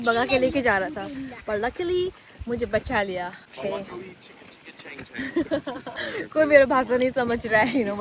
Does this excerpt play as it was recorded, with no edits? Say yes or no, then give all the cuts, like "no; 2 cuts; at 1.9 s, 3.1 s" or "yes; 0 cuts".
no; 2 cuts; at 3.5 s, 6.0 s